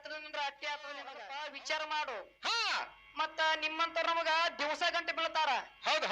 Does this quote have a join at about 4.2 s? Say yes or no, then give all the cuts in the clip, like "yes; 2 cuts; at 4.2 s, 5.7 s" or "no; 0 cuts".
no; 1 cut; at 1.2 s